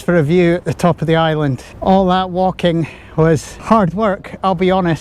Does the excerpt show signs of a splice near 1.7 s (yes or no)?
yes